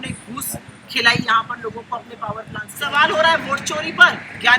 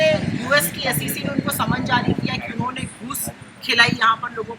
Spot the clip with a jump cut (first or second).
first